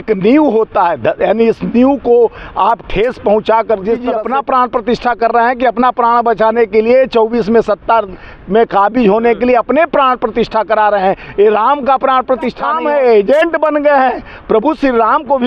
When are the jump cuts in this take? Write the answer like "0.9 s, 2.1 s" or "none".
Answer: 4.2 s, 12.6 s